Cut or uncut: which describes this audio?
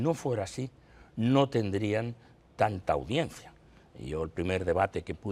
uncut